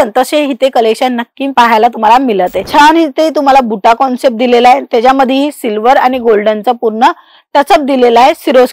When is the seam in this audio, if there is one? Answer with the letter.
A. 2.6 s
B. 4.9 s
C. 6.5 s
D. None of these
A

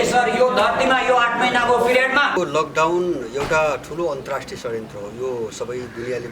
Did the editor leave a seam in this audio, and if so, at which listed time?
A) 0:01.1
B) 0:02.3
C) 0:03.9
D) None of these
B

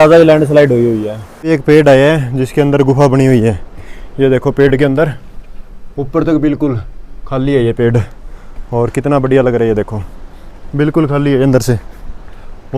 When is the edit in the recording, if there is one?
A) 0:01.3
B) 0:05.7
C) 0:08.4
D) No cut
A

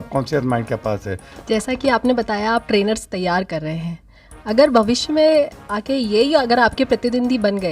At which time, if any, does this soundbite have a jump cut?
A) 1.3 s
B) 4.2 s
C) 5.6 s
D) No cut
A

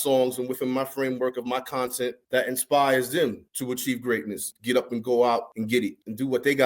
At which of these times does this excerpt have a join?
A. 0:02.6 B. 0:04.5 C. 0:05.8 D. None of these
B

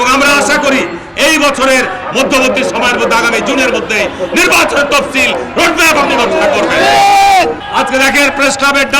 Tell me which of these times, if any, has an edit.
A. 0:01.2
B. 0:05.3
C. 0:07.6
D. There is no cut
C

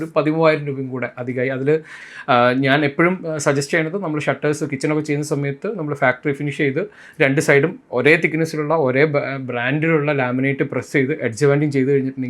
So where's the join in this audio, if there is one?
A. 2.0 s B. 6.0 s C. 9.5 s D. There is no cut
A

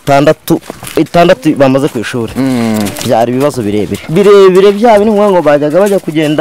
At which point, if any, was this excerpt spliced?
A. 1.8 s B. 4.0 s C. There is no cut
B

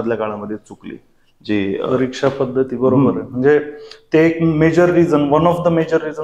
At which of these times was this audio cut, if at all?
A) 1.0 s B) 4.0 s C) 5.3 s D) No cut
D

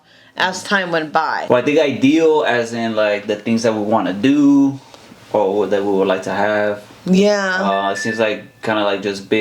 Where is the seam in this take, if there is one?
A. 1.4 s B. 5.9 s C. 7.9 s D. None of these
A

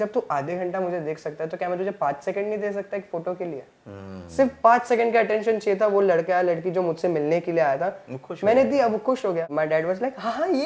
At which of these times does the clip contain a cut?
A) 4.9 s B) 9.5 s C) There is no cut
B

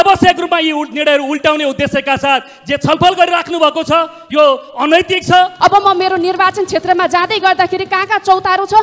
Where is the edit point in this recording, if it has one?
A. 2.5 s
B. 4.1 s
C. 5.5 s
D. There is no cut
C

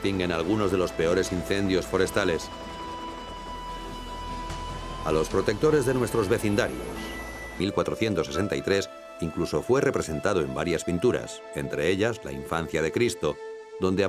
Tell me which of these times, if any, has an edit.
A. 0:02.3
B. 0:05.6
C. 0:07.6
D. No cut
D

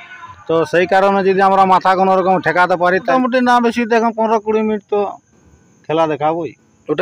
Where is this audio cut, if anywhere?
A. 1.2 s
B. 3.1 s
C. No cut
B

